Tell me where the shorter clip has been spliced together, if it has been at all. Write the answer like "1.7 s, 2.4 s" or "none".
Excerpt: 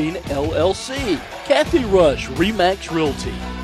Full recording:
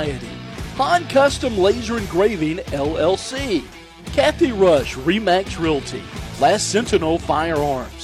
1.3 s